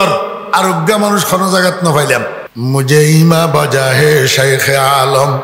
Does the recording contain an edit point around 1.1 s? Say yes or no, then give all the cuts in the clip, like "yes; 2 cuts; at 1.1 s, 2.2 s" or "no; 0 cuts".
no; 1 cut; at 2.4 s